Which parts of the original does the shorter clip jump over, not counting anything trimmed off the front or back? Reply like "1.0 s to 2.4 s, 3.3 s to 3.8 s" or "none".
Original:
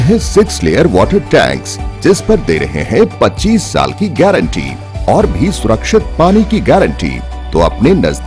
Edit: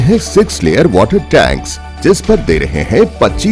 none